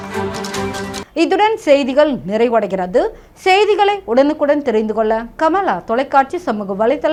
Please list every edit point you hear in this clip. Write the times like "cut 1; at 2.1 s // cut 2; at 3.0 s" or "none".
none

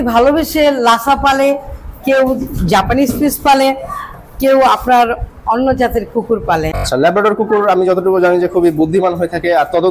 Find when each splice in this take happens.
cut 1; at 6.8 s

